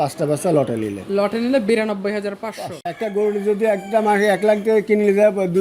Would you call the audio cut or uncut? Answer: cut